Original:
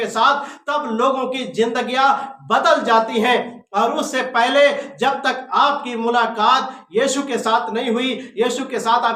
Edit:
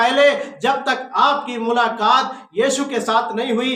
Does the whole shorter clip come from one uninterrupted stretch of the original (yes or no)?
yes